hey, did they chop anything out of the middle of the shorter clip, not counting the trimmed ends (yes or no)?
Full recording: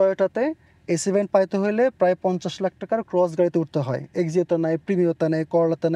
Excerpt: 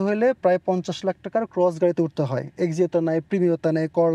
no